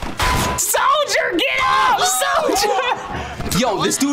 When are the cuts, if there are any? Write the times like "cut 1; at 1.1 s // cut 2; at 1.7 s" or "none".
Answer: none

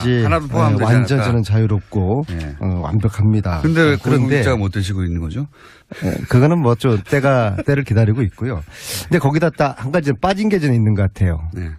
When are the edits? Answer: cut 1; at 7.4 s

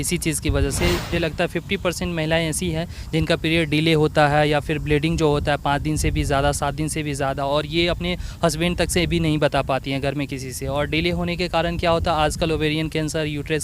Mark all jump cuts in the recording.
cut 1; at 1.1 s

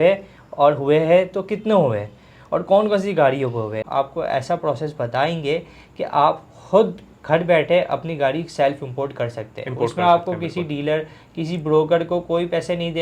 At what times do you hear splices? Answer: cut 1; at 3.8 s

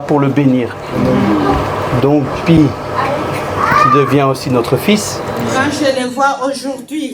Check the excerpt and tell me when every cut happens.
cut 1; at 5.5 s

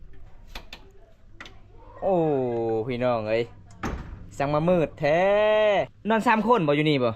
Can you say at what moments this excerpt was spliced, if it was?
cut 1; at 5.9 s

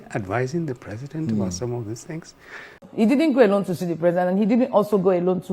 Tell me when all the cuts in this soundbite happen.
cut 1; at 2.8 s

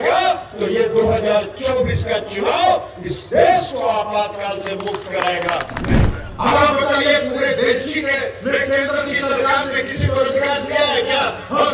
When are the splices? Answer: cut 1; at 6.0 s

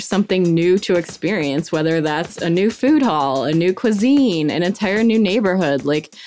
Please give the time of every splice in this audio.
none

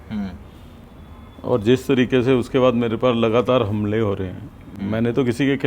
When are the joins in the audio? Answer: none

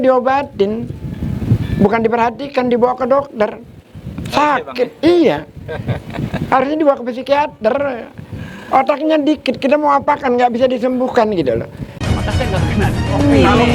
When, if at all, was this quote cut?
cut 1; at 11.9 s

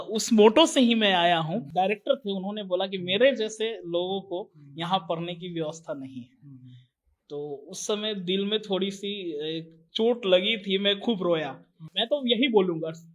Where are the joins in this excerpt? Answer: cut 1; at 1.6 s // cut 2; at 11.9 s

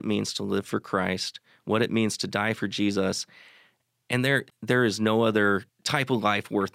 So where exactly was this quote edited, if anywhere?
cut 1; at 4.5 s // cut 2; at 5.8 s

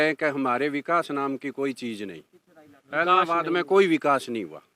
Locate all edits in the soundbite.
none

